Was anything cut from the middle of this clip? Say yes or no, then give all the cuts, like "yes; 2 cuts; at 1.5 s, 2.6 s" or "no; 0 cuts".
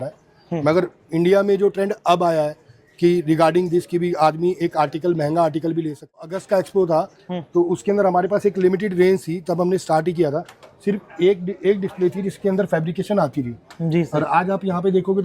yes; 1 cut; at 6.2 s